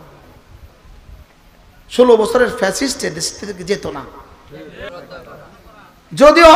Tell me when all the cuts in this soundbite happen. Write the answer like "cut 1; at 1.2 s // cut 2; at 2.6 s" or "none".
cut 1; at 4.9 s

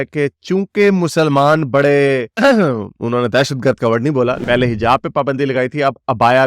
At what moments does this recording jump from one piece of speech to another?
cut 1; at 4.4 s

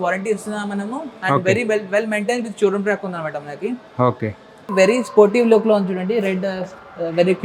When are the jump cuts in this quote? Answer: cut 1; at 4.6 s

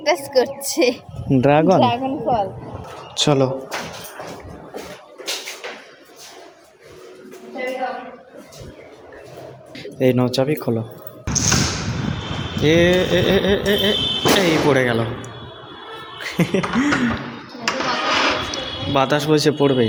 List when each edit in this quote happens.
none

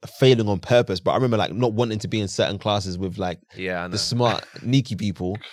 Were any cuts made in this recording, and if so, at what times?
none

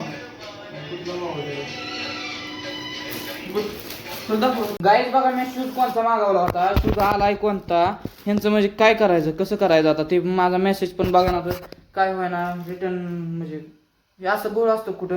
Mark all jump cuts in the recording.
cut 1; at 4.7 s

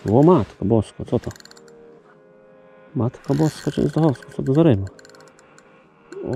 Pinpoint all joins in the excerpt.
none

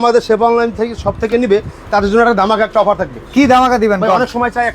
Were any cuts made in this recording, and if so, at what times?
none

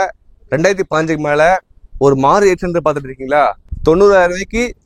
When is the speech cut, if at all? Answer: cut 1; at 3.7 s

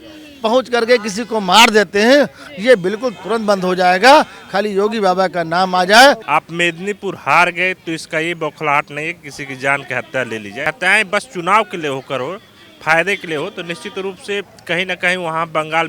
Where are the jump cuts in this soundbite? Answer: cut 1; at 6.2 s // cut 2; at 10.7 s

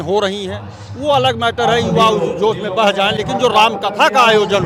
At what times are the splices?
none

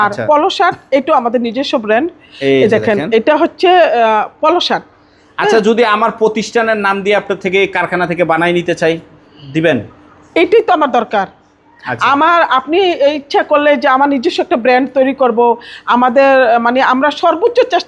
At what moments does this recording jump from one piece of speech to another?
none

